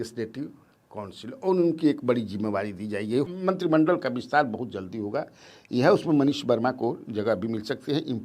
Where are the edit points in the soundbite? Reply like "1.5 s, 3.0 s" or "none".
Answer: 3.3 s